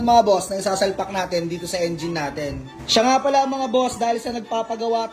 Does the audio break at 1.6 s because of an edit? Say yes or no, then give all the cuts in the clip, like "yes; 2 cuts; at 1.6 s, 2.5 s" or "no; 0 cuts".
no; 1 cut; at 2.9 s